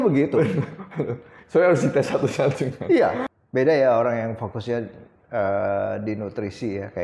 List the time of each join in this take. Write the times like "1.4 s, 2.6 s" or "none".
3.2 s

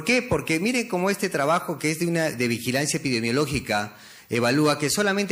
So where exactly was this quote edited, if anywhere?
none

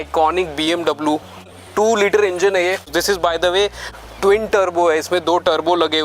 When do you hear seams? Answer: 2.9 s

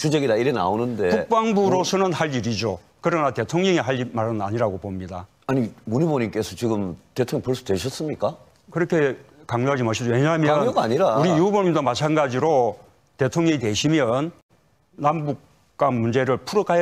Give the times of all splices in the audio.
14.5 s

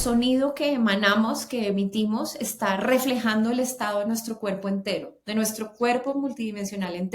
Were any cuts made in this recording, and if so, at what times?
none

